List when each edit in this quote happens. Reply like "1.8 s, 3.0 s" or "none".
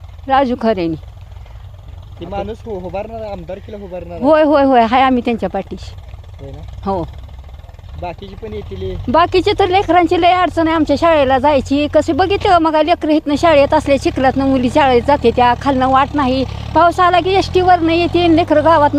none